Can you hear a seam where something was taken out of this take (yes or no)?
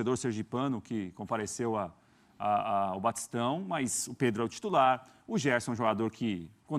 no